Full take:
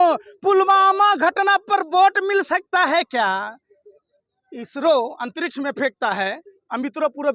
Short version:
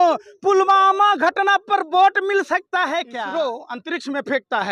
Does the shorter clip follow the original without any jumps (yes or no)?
no